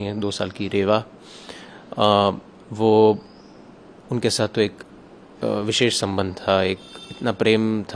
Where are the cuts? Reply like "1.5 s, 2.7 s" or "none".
none